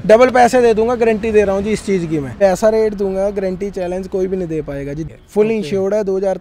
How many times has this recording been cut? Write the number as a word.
two